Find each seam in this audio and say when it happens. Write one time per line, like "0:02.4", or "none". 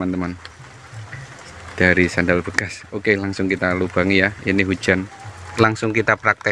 0:05.4

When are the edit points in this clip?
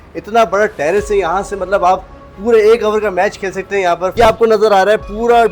0:04.1

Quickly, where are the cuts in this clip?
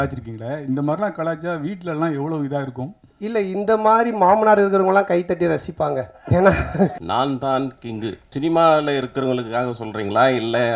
0:07.0
0:08.2

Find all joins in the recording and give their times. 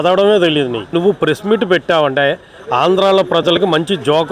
0:00.9

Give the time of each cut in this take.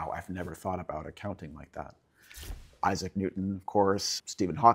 0:02.6

